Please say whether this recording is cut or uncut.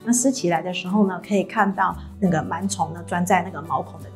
uncut